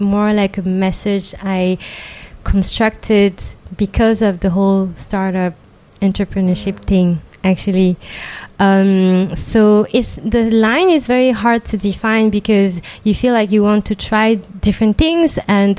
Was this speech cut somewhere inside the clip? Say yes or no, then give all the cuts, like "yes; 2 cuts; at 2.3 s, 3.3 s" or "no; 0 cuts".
no; 0 cuts